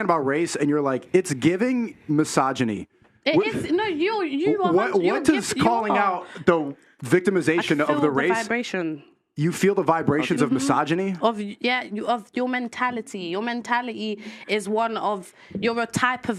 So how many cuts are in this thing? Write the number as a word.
zero